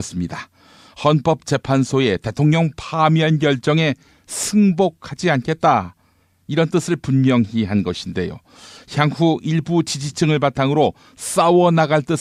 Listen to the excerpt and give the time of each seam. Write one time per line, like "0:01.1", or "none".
none